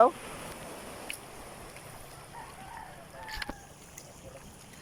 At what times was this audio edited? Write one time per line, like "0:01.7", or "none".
none